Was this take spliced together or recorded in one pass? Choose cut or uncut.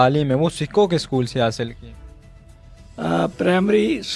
uncut